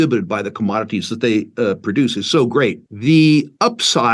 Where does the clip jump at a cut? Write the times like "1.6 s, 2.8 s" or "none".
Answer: 2.9 s